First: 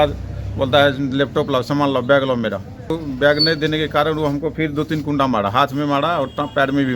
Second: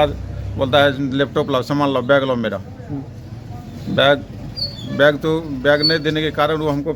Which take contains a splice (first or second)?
first